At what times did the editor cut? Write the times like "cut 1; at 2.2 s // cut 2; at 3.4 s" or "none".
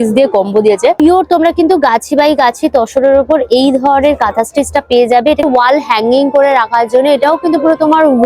cut 1; at 1.0 s // cut 2; at 5.4 s